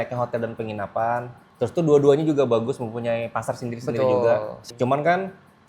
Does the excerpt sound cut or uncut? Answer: cut